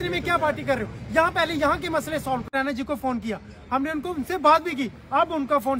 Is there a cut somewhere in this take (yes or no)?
yes